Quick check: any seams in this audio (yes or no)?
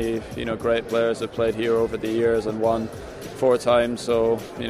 no